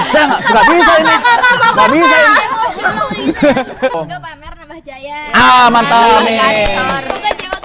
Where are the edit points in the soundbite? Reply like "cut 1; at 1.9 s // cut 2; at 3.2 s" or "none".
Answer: cut 1; at 4.0 s